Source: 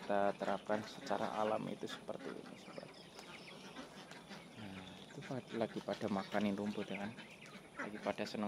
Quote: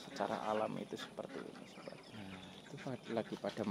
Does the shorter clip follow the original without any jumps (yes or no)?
no